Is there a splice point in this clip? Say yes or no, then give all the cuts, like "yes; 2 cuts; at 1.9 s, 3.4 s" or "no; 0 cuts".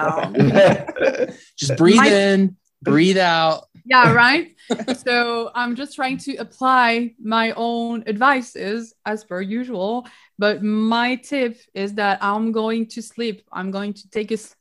no; 0 cuts